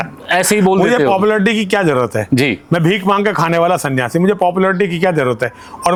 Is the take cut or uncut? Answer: uncut